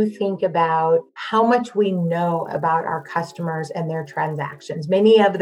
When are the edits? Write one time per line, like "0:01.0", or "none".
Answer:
0:01.2